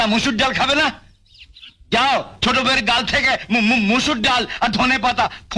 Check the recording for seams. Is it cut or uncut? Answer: uncut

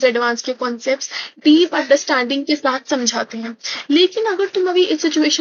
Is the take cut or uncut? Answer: uncut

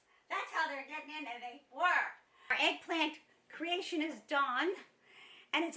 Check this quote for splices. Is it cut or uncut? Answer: cut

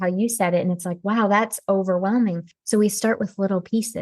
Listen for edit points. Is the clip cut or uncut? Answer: cut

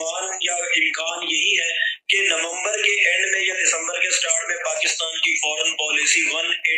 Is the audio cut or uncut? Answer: uncut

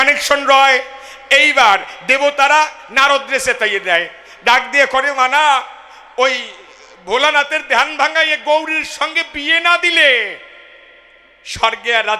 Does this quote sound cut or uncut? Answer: uncut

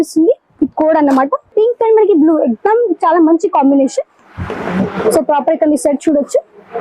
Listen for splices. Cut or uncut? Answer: cut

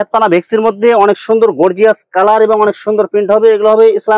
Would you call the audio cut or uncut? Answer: uncut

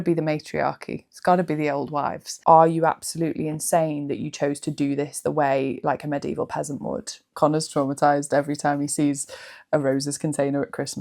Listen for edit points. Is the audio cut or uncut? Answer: cut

